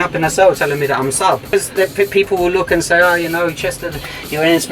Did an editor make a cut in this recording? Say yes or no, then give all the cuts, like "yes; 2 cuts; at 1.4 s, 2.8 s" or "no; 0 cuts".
yes; 1 cut; at 1.5 s